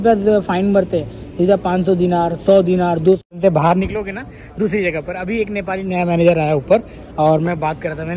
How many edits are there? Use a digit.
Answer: 1